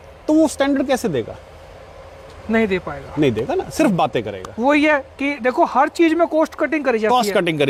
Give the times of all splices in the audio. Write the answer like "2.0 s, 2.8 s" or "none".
none